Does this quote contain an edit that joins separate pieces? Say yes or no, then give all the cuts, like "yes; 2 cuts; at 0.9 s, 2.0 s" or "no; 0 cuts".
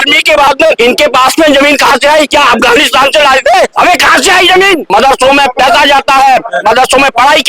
yes; 4 cuts; at 0.8 s, 2.3 s, 3.7 s, 4.9 s